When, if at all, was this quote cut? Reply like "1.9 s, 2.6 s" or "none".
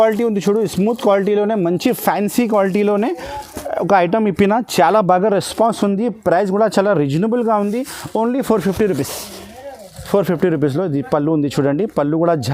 none